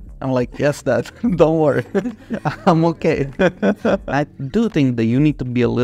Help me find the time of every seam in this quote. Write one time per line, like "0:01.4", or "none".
0:04.0

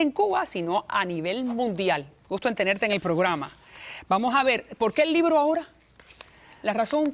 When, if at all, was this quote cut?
0:03.0

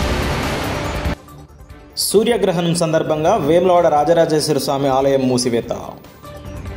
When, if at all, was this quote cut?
0:01.1

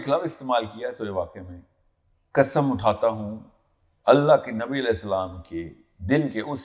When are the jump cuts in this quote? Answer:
none

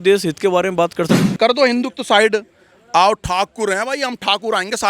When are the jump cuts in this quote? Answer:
0:01.1

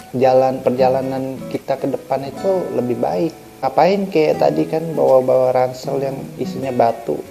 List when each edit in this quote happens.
0:03.6

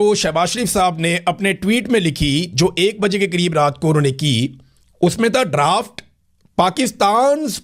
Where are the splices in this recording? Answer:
none

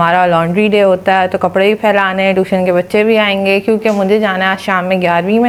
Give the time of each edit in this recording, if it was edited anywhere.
none

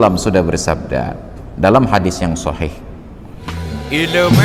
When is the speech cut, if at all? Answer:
0:03.5

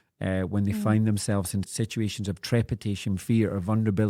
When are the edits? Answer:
0:01.7

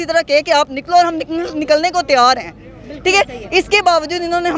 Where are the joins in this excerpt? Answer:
none

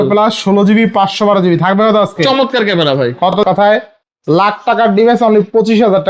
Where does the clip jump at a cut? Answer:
0:03.3

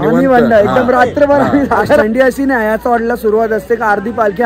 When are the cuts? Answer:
0:02.0

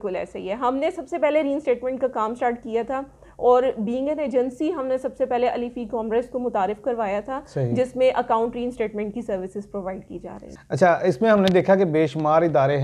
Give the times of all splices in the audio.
0:10.6

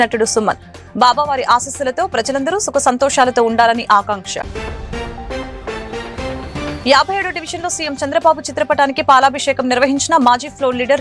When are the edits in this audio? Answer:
none

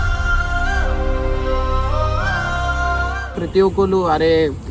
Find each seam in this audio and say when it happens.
0:03.4

